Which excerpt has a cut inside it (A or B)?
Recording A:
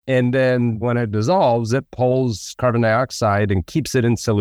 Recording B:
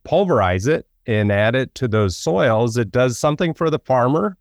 A